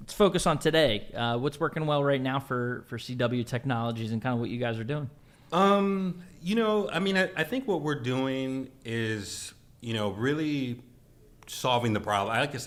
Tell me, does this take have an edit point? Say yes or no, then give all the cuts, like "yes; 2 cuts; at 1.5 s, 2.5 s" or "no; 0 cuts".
no; 0 cuts